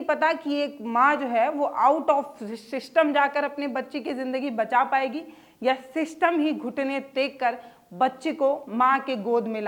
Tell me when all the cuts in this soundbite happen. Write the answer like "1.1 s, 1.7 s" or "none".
none